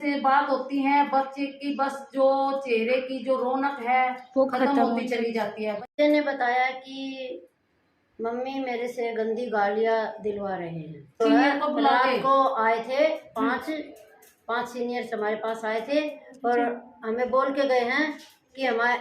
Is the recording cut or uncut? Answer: cut